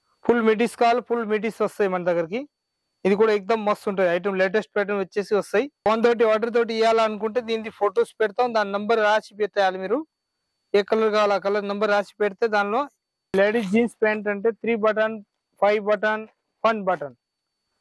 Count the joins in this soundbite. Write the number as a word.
two